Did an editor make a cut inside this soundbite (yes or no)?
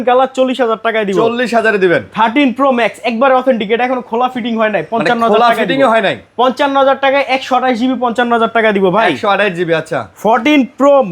no